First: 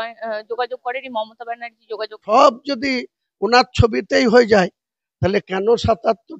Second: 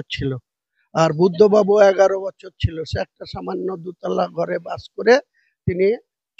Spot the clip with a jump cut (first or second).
first